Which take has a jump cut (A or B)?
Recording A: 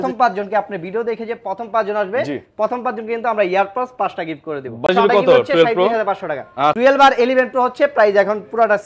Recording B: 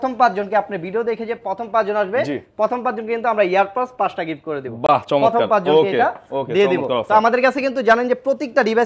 A